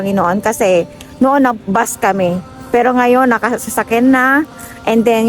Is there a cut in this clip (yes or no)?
no